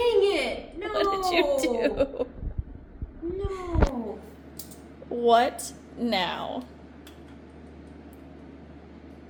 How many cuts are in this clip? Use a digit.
0